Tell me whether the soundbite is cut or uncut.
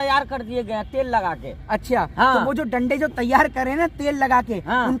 uncut